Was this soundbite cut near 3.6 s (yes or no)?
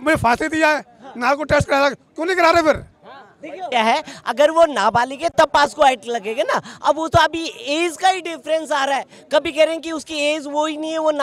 no